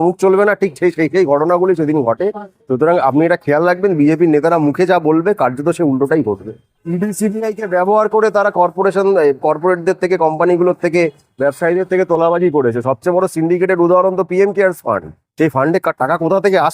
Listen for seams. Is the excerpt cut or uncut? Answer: cut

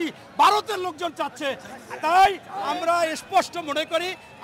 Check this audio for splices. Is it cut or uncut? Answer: uncut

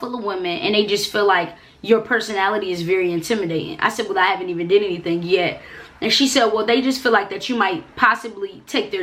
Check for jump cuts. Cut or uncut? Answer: uncut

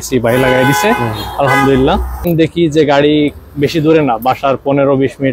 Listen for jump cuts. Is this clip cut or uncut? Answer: cut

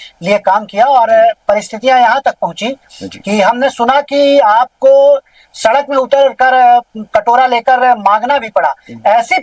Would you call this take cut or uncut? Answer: uncut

